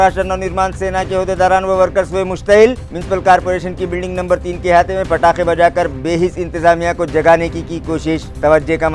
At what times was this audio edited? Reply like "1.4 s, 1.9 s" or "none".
none